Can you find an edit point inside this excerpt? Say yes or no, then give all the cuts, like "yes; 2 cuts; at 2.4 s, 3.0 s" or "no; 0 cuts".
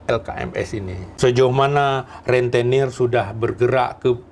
yes; 1 cut; at 1.0 s